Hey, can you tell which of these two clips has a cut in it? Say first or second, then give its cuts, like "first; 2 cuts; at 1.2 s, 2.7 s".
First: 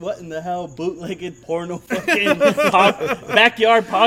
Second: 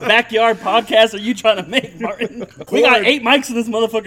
second; 1 cut; at 2.6 s